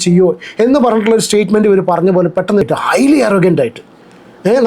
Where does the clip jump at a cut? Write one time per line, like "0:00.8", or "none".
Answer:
0:02.6